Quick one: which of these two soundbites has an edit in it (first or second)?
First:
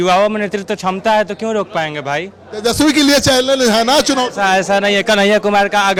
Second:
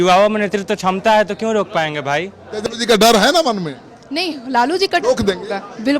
second